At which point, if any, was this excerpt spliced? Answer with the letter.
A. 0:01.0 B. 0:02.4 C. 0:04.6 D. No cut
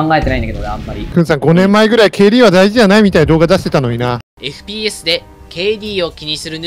A